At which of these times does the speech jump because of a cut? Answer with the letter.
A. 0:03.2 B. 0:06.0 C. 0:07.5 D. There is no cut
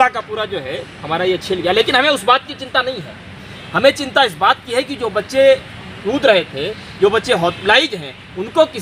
D